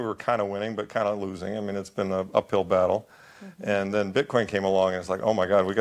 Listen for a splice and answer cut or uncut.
uncut